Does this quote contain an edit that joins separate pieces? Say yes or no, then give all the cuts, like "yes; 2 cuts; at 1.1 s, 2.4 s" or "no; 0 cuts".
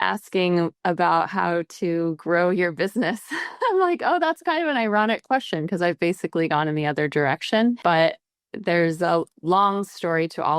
yes; 2 cuts; at 7.8 s, 9.3 s